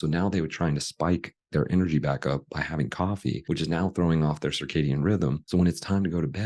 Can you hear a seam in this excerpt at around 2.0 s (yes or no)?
no